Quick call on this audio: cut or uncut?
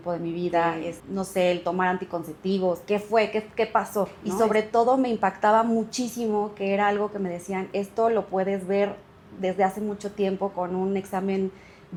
uncut